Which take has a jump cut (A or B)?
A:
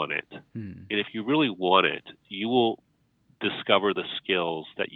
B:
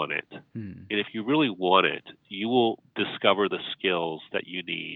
B